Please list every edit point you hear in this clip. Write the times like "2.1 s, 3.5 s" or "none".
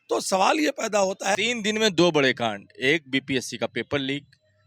1.4 s